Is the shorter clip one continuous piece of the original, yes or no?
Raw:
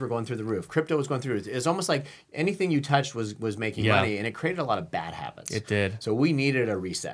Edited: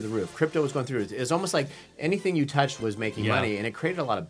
no